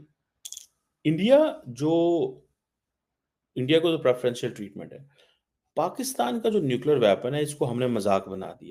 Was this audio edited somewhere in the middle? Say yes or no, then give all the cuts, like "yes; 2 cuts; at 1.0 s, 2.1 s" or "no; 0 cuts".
no; 0 cuts